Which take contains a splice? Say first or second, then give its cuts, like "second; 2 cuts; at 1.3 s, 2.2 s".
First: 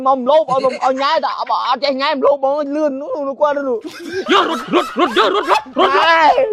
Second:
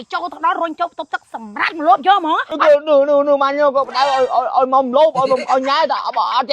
second; 1 cut; at 2.5 s